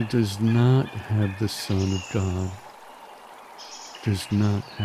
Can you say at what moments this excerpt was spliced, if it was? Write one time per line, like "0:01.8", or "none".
0:02.5
0:04.0